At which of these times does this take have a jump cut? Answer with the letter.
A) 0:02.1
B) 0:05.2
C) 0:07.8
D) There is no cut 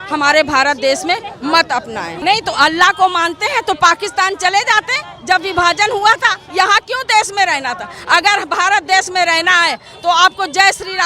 A